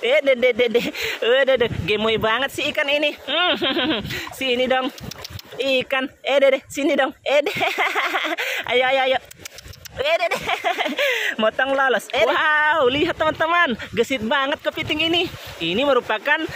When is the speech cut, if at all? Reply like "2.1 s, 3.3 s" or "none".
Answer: 12.3 s